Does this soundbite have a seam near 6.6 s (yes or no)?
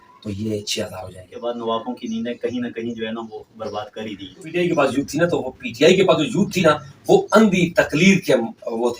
no